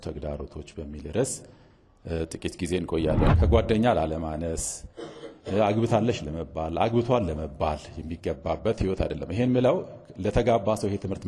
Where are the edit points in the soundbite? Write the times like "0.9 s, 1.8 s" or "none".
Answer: 3.3 s

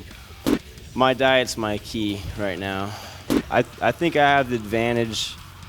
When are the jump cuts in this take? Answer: 3.3 s

